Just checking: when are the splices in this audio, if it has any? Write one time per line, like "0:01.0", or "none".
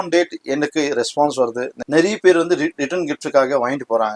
0:01.8